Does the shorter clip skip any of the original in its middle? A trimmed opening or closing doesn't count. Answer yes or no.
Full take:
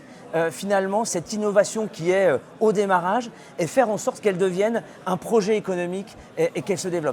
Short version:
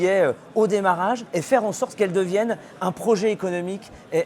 yes